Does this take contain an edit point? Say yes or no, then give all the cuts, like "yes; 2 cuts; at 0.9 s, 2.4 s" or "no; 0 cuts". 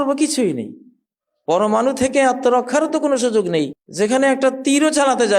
yes; 1 cut; at 3.8 s